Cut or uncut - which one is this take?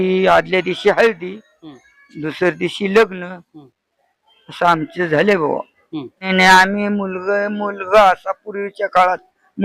cut